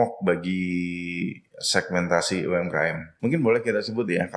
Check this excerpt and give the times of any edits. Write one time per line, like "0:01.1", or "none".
0:03.1